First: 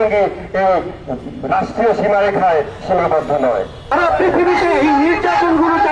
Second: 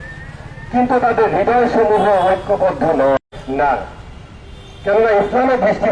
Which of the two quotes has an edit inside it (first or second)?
first